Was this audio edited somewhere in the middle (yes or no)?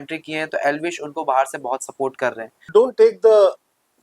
yes